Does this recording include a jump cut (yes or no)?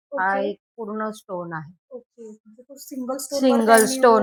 no